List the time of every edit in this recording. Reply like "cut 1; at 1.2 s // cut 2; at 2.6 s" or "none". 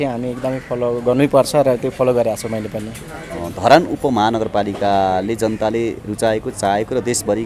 cut 1; at 3.4 s

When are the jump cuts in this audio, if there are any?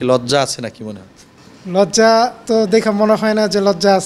cut 1; at 2.4 s

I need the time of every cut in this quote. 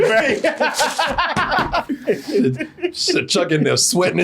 cut 1; at 1.9 s

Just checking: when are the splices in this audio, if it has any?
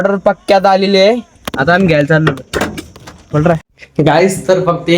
cut 1; at 3.8 s

